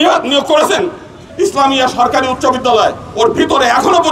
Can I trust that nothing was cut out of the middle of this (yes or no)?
no